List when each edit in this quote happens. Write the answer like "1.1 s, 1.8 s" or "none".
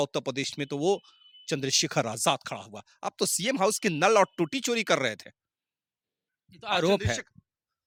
none